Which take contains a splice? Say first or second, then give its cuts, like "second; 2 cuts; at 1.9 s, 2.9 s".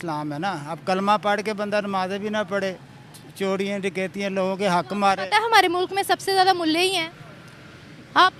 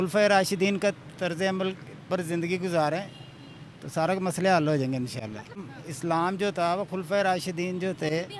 second; 1 cut; at 5.5 s